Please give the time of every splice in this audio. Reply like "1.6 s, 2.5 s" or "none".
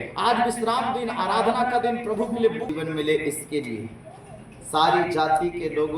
2.7 s